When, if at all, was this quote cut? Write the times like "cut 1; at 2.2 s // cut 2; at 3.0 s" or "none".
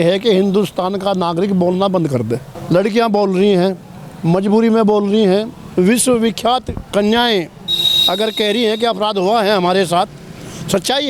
cut 1; at 2.5 s